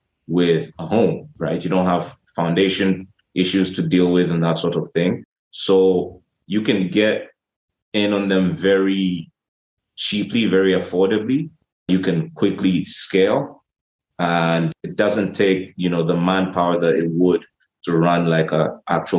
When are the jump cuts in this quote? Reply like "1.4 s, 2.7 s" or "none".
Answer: 11.9 s, 14.8 s

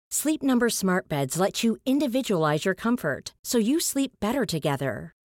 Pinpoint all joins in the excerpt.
none

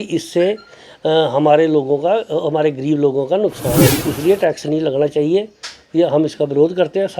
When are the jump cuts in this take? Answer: 4.0 s

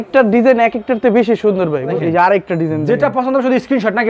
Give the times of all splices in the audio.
2.0 s

